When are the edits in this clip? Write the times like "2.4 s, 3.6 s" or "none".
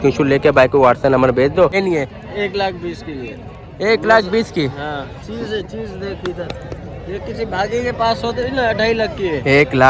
1.7 s